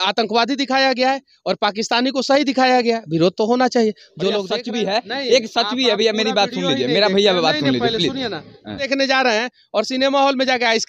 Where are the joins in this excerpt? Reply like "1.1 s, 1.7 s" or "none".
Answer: 4.4 s, 8.9 s